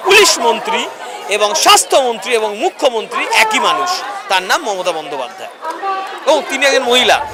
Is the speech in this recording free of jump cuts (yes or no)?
yes